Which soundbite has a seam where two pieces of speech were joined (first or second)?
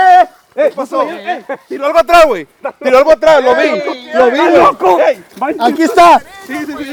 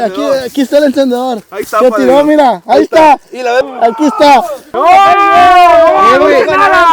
second